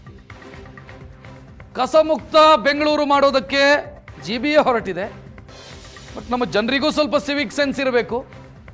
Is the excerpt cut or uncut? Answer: cut